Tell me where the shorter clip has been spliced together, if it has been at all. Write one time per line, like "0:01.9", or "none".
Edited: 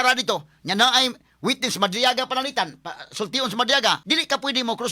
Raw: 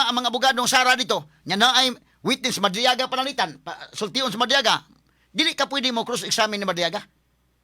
0:04.0